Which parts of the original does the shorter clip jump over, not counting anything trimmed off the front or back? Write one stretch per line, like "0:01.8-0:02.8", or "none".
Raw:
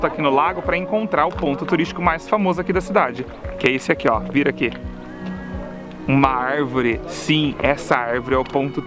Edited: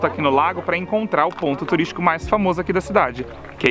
none